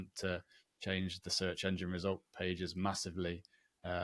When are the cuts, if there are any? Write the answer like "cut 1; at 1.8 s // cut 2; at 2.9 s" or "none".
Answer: none

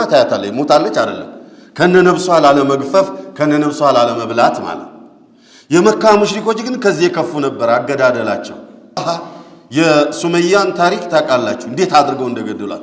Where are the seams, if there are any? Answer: cut 1; at 9.0 s

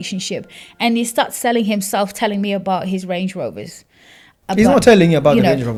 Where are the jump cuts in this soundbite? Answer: none

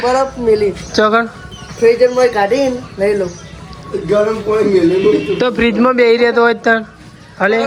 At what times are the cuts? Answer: none

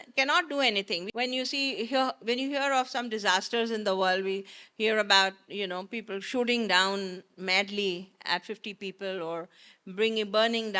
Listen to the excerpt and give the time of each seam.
cut 1; at 1.1 s

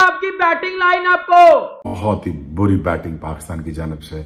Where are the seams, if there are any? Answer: cut 1; at 1.8 s

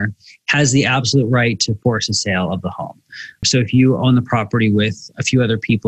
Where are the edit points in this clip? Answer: cut 1; at 3.4 s

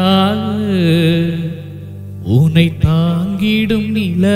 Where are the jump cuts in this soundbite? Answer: none

